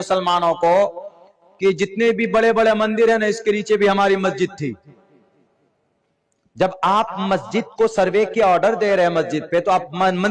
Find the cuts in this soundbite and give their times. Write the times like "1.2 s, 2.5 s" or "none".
none